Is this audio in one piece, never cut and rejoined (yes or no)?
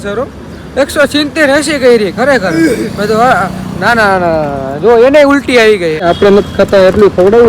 no